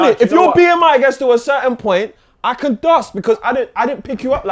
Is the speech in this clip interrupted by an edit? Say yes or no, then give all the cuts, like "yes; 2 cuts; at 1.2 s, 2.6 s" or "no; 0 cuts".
no; 0 cuts